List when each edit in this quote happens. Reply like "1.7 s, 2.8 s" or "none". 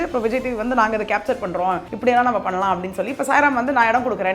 1.9 s